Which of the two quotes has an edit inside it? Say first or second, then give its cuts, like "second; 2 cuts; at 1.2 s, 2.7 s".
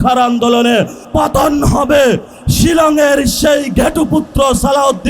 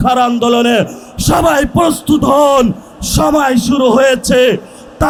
first; 2 cuts; at 1.0 s, 2.3 s